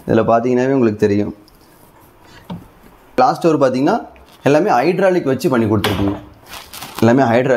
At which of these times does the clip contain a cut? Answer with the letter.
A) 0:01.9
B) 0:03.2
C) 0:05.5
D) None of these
B